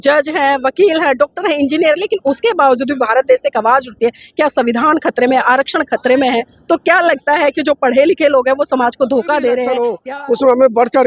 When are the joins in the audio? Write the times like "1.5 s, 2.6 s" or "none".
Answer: 10.0 s